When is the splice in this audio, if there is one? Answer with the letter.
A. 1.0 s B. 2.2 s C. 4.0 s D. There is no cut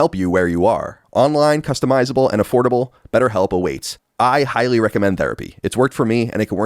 A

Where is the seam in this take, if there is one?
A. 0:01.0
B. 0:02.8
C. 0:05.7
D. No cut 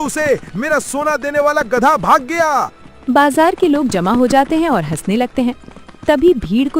B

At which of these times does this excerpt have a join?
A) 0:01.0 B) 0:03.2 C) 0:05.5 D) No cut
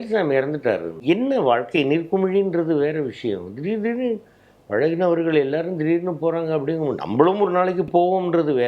A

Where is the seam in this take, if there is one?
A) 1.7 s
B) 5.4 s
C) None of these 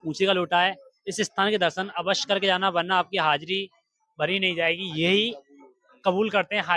C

